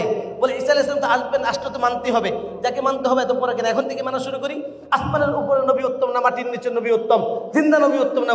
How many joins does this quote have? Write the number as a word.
zero